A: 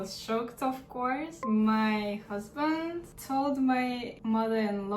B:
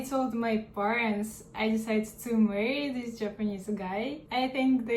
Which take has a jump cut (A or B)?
A